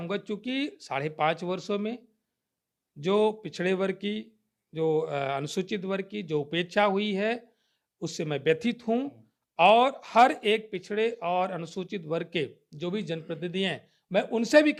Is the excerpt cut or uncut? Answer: uncut